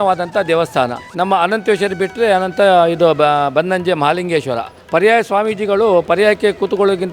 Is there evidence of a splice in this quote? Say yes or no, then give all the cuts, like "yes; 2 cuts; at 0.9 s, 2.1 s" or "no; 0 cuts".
yes; 2 cuts; at 1.0 s, 4.7 s